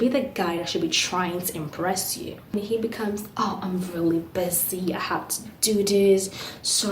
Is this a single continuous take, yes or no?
no